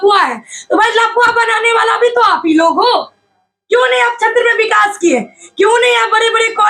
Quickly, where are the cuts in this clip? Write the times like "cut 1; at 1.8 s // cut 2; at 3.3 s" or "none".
none